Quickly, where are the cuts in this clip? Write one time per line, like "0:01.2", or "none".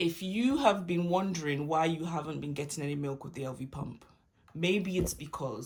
none